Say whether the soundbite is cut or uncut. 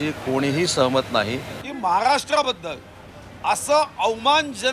cut